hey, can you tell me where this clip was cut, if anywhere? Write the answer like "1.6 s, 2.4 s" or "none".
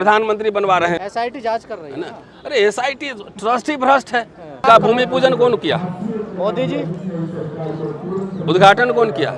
1.0 s, 4.6 s